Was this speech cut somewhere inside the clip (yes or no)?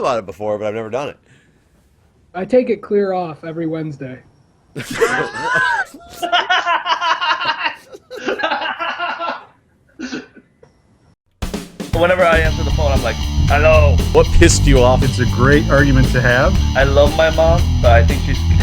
yes